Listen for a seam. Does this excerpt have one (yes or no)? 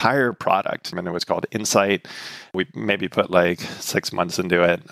yes